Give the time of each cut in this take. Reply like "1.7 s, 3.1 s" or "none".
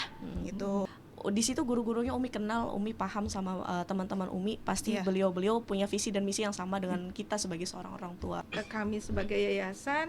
1.0 s, 8.5 s

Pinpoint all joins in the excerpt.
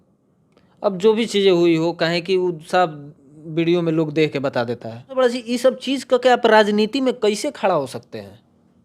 5.2 s

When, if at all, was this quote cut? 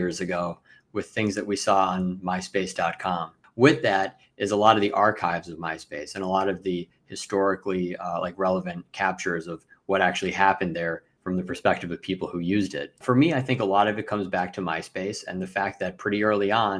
3.4 s, 11.1 s, 13.0 s

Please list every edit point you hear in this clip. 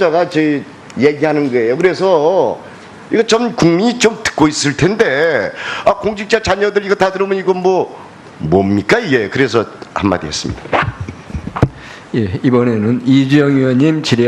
1.2 s

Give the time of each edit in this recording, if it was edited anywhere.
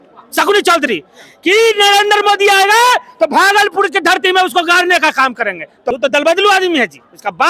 5.8 s

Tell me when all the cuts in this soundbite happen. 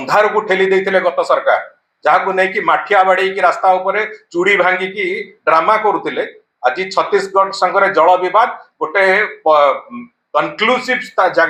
none

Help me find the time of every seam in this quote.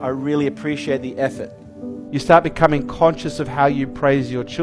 2.0 s

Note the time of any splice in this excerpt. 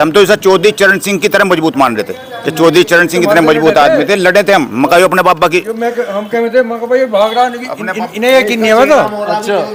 none

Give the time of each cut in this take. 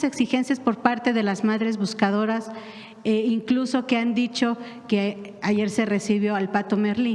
none

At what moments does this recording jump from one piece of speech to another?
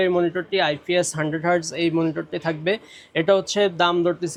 none

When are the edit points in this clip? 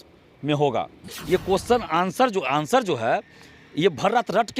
1.0 s

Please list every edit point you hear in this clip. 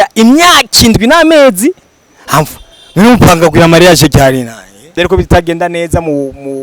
4.8 s

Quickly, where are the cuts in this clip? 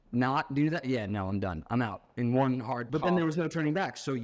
2.9 s

